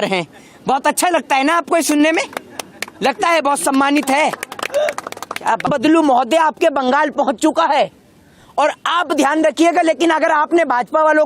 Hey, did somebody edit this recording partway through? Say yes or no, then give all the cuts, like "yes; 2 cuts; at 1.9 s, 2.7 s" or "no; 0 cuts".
yes; 1 cut; at 5.7 s